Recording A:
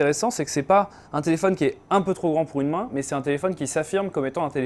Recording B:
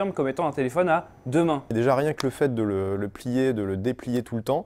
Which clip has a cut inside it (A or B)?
B